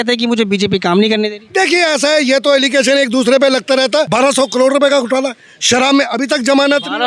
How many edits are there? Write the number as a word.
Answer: one